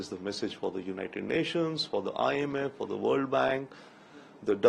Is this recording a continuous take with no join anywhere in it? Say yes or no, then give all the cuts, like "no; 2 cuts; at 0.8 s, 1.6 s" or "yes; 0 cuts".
yes; 0 cuts